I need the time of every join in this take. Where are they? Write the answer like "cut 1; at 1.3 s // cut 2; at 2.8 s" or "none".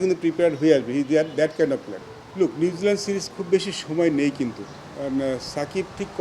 cut 1; at 2.0 s